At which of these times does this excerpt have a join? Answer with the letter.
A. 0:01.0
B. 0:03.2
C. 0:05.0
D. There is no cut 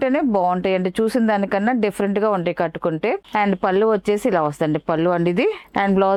D